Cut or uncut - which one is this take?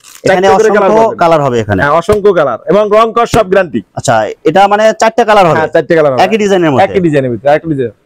uncut